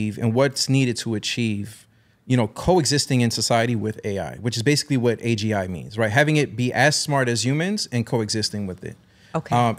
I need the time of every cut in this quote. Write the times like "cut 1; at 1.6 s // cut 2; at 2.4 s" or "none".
none